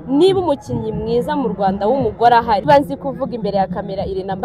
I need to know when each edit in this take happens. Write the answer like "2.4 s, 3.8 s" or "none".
2.7 s